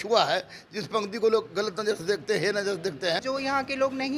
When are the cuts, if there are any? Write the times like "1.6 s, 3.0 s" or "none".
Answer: 3.2 s